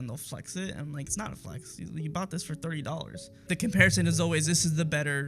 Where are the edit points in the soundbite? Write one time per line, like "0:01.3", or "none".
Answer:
0:03.4